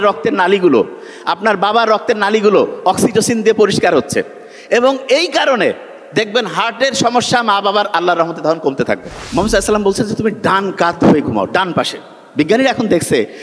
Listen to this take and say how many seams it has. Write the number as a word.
one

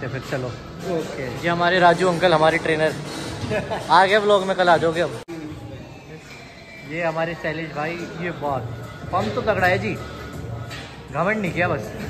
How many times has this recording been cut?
one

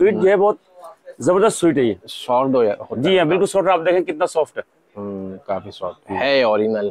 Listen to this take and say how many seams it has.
zero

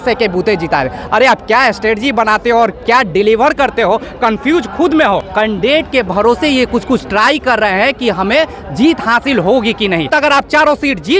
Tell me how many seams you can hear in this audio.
two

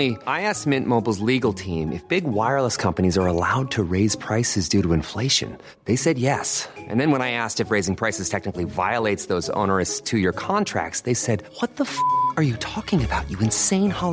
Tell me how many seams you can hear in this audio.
zero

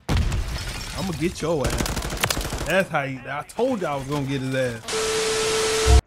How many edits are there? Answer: one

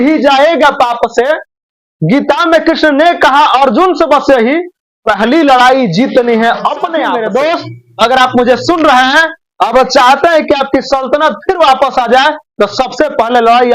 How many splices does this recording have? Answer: one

